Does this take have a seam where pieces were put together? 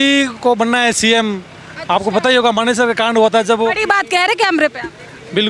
no; 0 cuts

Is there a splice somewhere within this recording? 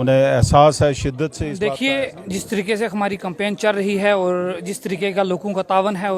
yes; 1 cut; at 1.4 s

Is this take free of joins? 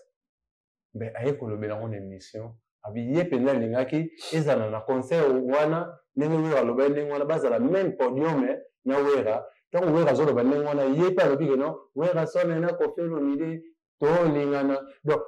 yes; 0 cuts

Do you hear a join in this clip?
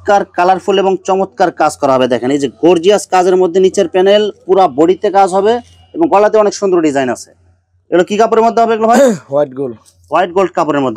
no; 0 cuts

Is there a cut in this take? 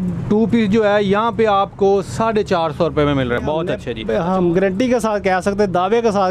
yes; 1 cut; at 3.6 s

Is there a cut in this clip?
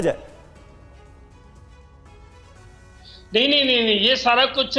no; 0 cuts

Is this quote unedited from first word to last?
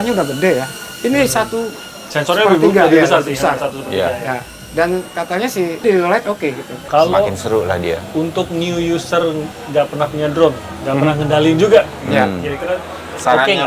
no; 2 cuts; at 5.8 s, 6.7 s

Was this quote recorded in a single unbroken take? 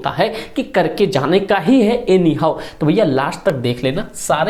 yes; 0 cuts

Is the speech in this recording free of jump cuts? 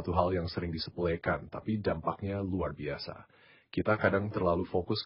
yes; 0 cuts

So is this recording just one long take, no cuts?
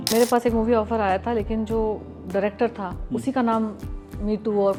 yes; 0 cuts

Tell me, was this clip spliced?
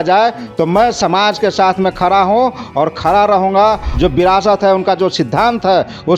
yes; 1 cut; at 3.9 s

